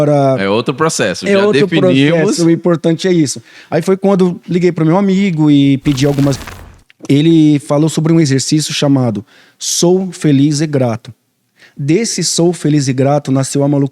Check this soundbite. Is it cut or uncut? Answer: cut